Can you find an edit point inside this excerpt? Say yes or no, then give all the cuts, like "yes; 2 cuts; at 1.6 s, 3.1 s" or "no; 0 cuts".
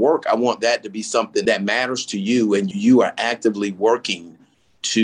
yes; 2 cuts; at 1.4 s, 2.7 s